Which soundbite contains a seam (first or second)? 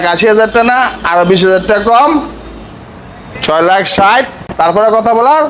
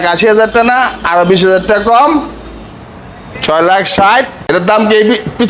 second